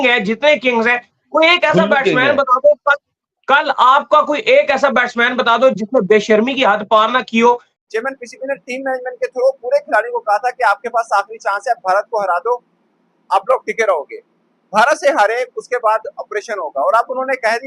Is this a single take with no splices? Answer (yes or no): no